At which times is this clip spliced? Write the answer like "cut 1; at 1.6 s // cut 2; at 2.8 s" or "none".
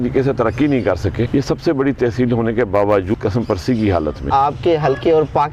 cut 1; at 1.3 s // cut 2; at 3.1 s // cut 3; at 4.2 s